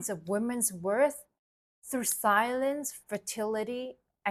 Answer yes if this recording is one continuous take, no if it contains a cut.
yes